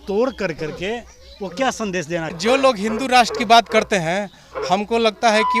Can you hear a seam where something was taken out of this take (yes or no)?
yes